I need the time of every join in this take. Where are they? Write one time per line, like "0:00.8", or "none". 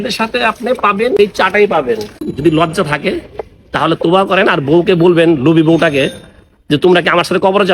0:01.2
0:02.2